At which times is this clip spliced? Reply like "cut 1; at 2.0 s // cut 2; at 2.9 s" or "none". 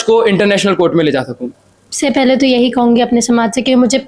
cut 1; at 1.9 s